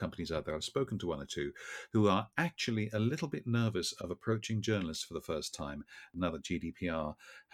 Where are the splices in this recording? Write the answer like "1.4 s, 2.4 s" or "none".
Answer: none